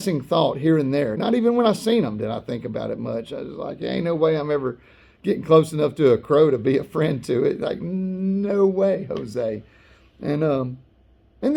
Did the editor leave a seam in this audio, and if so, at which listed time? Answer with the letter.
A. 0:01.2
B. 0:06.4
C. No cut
A